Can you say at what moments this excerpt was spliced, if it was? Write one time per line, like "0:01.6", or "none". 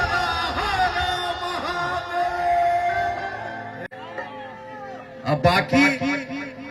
0:03.9